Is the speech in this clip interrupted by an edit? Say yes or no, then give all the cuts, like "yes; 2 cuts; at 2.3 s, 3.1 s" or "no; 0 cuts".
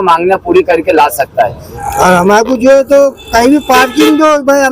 yes; 1 cut; at 1.7 s